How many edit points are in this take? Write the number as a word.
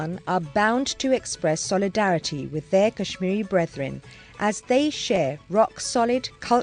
one